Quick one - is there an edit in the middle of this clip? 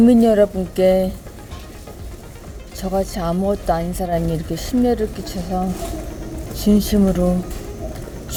no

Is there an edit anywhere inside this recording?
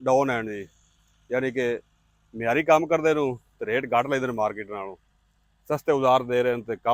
no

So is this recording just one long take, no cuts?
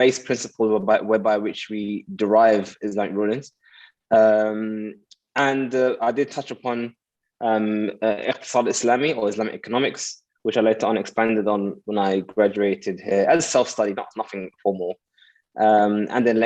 yes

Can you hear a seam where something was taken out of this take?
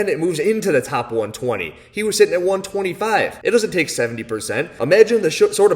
yes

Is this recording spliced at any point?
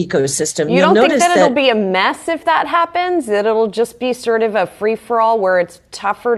no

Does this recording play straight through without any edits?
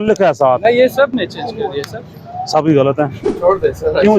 no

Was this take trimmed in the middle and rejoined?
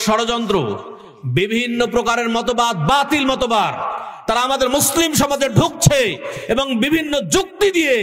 no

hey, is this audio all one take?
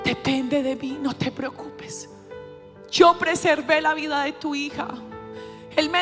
yes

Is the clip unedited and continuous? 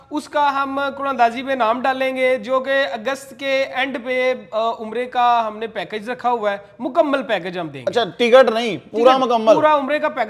yes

